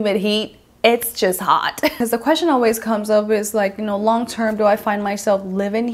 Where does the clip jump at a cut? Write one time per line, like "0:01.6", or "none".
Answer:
0:01.9